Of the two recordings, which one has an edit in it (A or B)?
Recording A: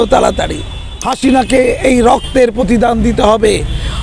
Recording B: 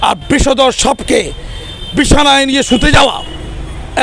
A